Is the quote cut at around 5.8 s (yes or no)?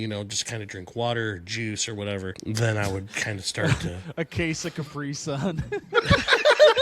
no